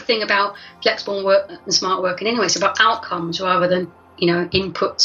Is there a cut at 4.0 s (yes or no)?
yes